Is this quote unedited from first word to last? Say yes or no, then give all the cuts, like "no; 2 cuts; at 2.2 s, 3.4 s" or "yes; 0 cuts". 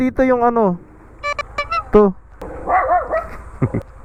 yes; 0 cuts